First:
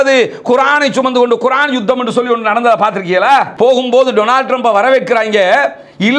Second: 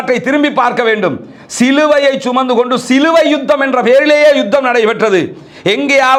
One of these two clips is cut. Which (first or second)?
first